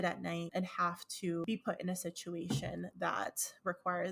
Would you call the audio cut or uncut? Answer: cut